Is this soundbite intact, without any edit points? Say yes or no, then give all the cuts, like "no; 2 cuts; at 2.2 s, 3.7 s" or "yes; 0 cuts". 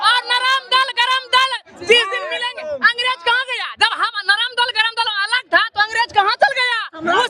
yes; 0 cuts